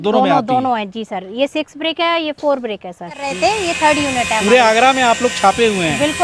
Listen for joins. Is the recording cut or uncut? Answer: cut